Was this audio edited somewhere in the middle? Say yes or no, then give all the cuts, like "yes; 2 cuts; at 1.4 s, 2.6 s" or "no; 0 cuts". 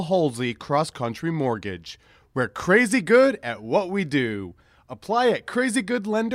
no; 0 cuts